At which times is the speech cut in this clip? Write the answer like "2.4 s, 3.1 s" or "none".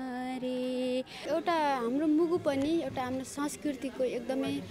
1.2 s